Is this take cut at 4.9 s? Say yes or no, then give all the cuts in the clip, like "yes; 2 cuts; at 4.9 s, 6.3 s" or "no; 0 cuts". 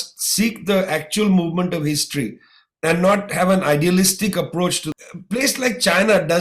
yes; 1 cut; at 4.9 s